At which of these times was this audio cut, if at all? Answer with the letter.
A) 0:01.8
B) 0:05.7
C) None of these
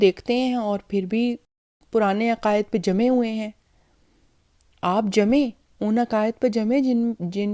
A